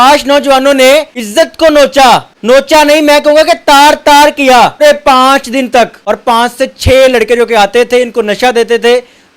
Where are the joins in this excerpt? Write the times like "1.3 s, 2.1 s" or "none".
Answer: 1.2 s, 2.3 s, 4.8 s, 6.0 s